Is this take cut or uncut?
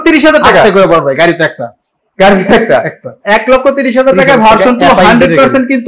uncut